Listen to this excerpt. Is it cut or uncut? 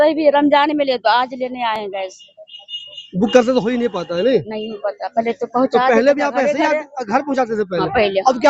uncut